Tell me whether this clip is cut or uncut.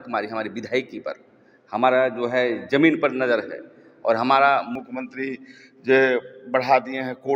cut